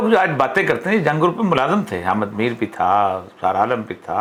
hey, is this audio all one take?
yes; 0 cuts

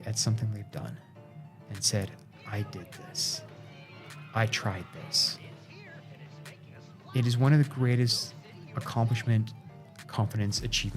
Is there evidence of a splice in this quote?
no; 0 cuts

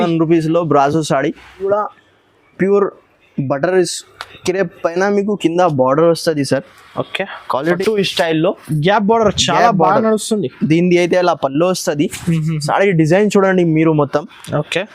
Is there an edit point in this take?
yes; 2 cuts; at 1.2 s, 7.8 s

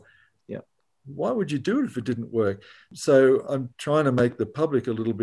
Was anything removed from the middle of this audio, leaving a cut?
yes; 2 cuts; at 2.9 s, 3.7 s

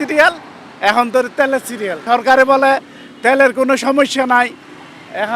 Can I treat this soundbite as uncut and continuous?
no; 1 cut; at 2.0 s

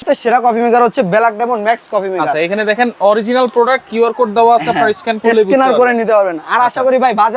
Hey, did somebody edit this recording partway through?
no; 0 cuts

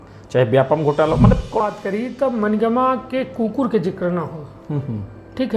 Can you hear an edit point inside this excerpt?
yes; 1 cut; at 1.6 s

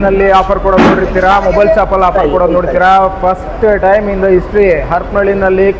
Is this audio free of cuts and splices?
yes; 0 cuts

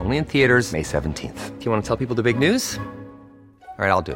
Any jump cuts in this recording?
no; 0 cuts

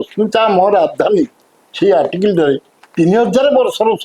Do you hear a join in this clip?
no; 0 cuts

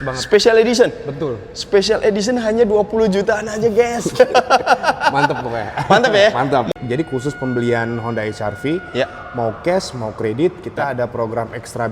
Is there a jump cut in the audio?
yes; 1 cut; at 6.7 s

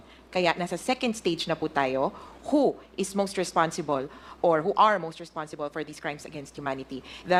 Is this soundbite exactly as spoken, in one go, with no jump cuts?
yes; 0 cuts

